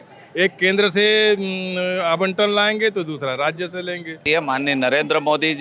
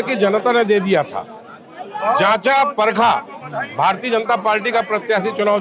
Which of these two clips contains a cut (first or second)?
first